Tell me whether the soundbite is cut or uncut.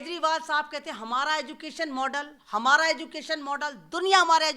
uncut